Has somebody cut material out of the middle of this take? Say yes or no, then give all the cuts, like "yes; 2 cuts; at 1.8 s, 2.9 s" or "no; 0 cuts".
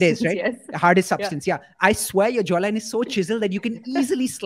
no; 0 cuts